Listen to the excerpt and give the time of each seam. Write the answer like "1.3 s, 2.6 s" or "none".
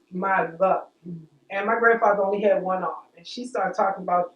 none